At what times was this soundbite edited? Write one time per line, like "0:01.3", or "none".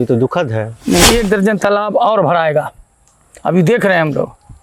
0:01.0